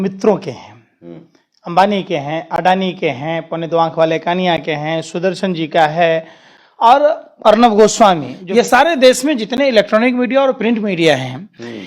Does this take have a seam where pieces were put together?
yes; 1 cut; at 8.3 s

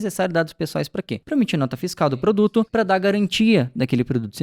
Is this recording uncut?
no; 2 cuts; at 1.2 s, 2.7 s

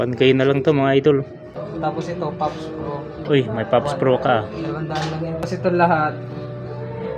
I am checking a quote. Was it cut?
yes; 1 cut; at 1.6 s

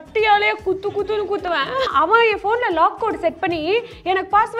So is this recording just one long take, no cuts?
no; 1 cut; at 1.9 s

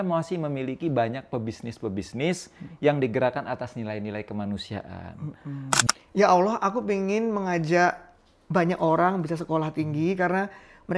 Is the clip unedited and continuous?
no; 1 cut; at 5.7 s

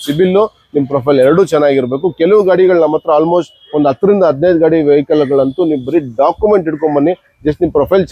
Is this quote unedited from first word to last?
yes; 0 cuts

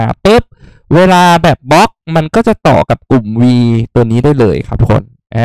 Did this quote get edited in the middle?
no; 0 cuts

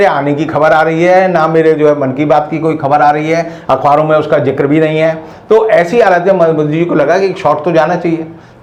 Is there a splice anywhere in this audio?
no; 0 cuts

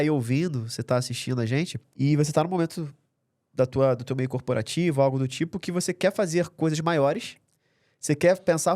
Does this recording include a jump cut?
yes; 1 cut; at 1.8 s

